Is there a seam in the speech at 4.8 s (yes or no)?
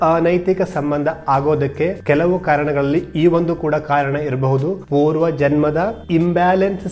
yes